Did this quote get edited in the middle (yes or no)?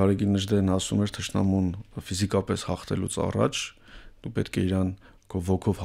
no